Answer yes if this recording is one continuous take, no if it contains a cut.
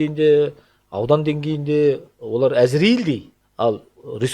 no